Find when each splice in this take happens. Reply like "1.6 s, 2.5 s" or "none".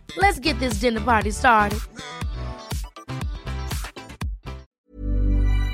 4.8 s